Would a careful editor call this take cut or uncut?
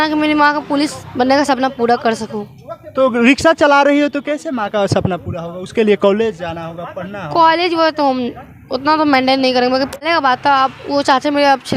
cut